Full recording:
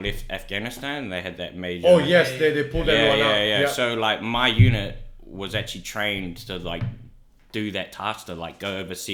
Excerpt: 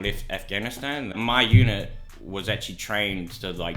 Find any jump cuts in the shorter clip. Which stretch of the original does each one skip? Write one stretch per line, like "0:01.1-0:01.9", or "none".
0:01.1-0:04.2